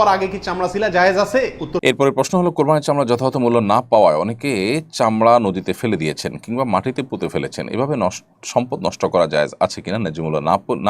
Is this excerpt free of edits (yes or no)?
no